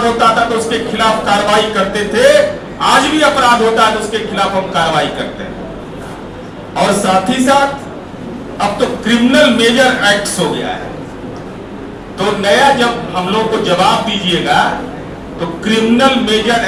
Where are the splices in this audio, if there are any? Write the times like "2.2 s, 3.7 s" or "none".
none